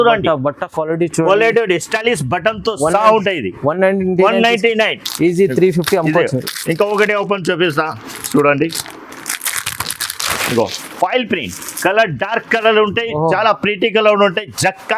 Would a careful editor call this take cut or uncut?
uncut